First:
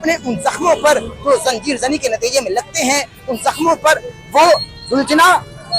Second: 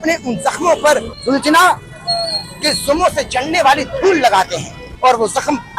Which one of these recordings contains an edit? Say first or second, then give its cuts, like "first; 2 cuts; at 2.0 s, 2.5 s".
second; 2 cuts; at 1.1 s, 4.9 s